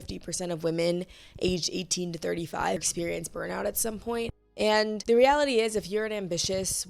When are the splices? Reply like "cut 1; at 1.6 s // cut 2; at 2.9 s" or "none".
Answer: cut 1; at 2.8 s // cut 2; at 4.6 s